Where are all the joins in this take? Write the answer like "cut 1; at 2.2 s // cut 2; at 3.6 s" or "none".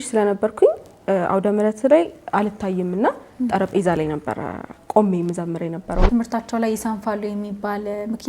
cut 1; at 6.1 s